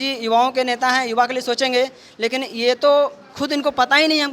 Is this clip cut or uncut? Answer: uncut